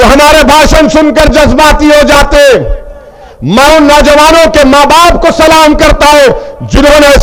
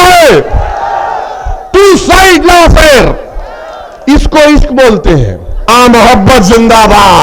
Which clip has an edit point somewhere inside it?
second; 1 cut; at 5.7 s

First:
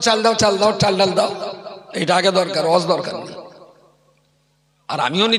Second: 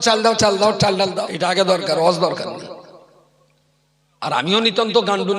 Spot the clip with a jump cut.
second; 1 cut; at 1.2 s

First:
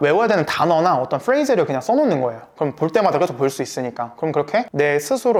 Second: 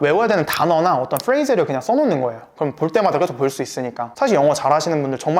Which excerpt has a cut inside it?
second; 1 cut; at 4.1 s

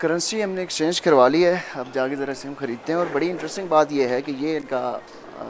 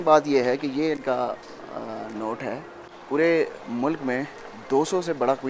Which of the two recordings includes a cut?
second; 1 cut; at 2.9 s

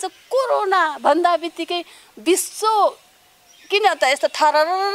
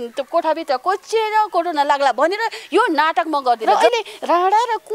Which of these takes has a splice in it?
second; 1 cut; at 3.6 s

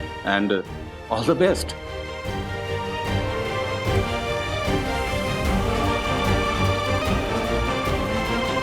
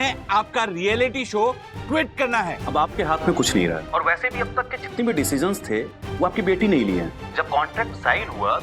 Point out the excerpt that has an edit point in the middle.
second; 3 cuts; at 2.6 s, 3.8 s, 7.2 s

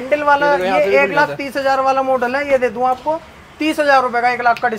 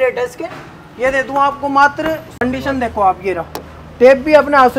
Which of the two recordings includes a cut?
second; 1 cut; at 2.4 s

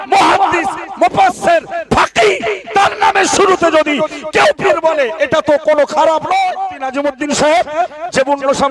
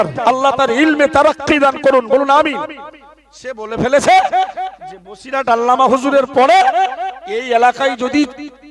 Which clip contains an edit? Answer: first; 1 cut; at 6.7 s

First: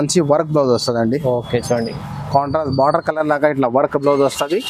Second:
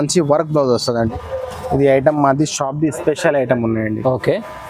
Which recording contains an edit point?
second; 1 cut; at 1.1 s

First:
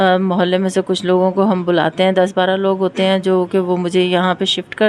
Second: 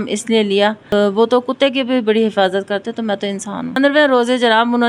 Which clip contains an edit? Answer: second; 2 cuts; at 0.9 s, 3.8 s

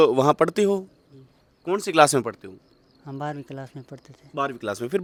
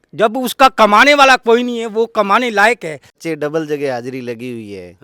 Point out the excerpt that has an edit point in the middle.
second; 1 cut; at 3.1 s

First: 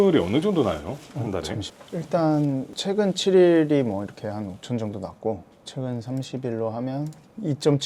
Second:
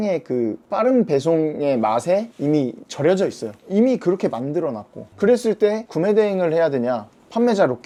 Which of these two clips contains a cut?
first; 1 cut; at 1.6 s

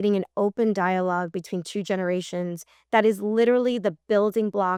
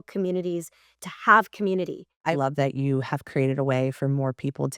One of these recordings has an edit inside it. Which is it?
second; 1 cut; at 2.4 s

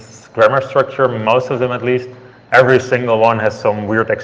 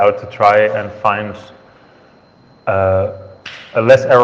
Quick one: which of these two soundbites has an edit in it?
first; 1 cut; at 2.9 s

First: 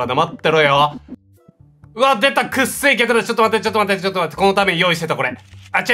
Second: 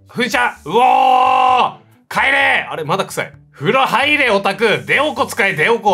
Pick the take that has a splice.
first; 1 cut; at 1.1 s

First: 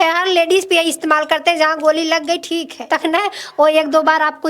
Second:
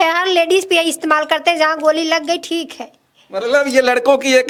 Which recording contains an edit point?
first; 1 cut; at 2.8 s

